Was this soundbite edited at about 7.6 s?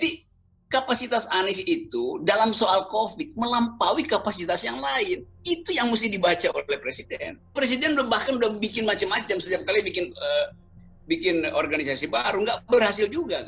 yes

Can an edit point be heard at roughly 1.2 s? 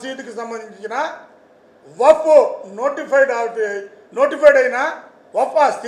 no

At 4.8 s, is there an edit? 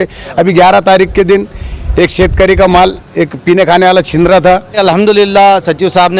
yes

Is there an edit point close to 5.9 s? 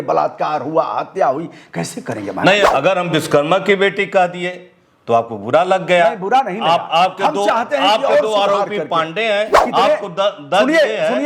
no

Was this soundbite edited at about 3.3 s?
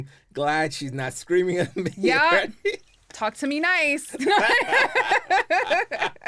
no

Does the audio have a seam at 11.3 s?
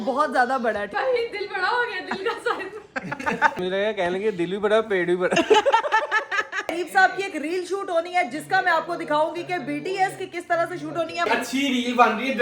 yes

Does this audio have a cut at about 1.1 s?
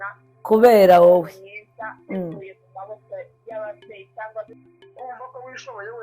no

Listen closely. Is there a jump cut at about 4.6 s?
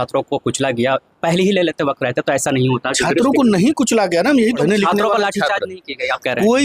yes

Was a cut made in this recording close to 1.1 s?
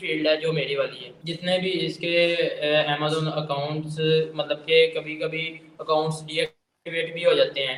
no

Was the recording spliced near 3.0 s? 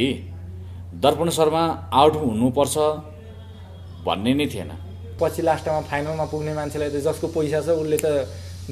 no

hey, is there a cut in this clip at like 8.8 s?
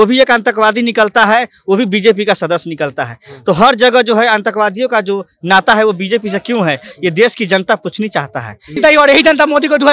yes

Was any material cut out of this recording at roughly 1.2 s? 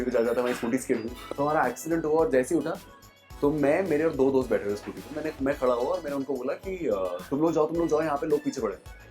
yes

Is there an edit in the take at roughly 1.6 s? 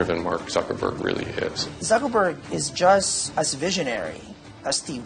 yes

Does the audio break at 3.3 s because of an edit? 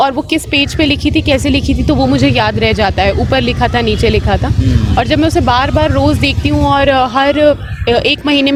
no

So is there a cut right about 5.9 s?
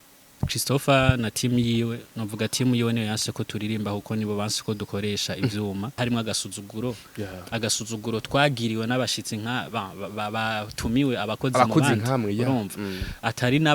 yes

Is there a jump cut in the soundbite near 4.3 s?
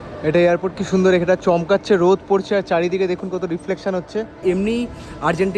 yes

